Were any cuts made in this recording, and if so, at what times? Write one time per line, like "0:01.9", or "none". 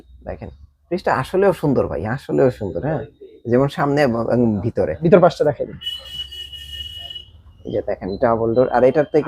0:05.0